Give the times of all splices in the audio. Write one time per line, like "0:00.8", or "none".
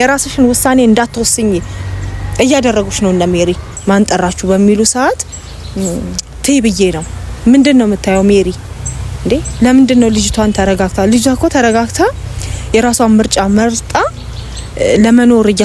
0:03.7

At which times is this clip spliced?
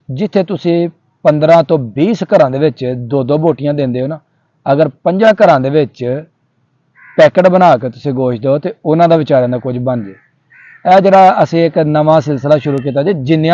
none

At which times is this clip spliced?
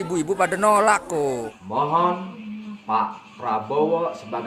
0:01.5

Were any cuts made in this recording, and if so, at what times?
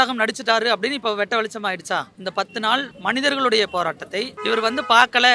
0:04.3

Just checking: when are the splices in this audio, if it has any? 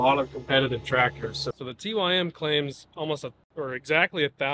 0:01.4

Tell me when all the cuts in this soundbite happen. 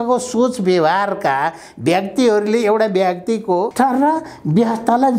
0:03.7

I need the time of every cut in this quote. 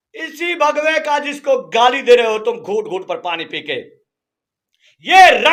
none

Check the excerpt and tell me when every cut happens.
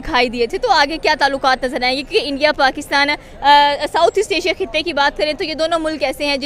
none

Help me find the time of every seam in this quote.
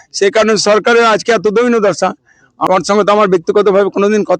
0:02.5

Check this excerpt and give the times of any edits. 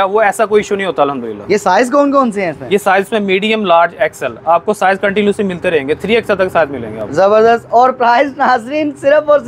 none

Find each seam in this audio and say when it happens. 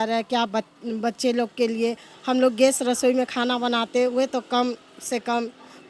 none

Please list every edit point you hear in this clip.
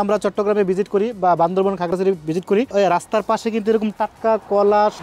none

